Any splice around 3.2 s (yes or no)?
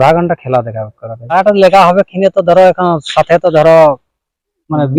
no